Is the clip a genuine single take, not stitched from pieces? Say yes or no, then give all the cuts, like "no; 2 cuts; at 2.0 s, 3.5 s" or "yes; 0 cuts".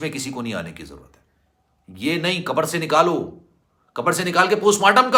yes; 0 cuts